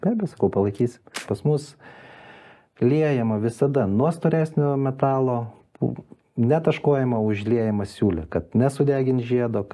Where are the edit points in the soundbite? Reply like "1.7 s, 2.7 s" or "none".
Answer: 1.2 s